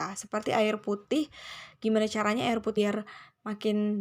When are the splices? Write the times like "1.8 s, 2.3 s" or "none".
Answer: 2.8 s

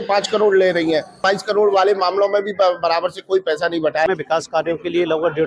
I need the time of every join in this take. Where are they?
1.2 s, 4.1 s

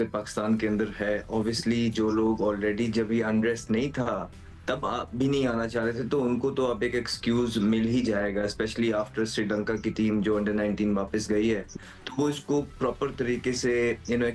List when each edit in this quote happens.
none

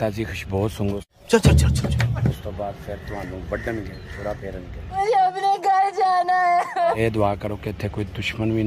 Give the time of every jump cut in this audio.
2.3 s, 7.0 s

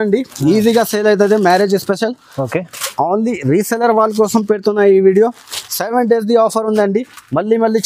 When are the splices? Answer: none

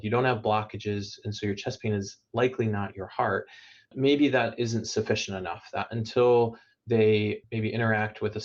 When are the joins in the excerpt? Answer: 3.9 s

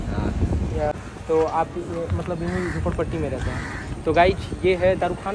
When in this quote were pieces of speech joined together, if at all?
0.9 s

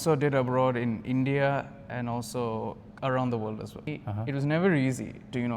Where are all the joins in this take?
3.9 s

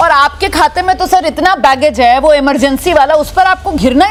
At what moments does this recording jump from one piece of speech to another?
none

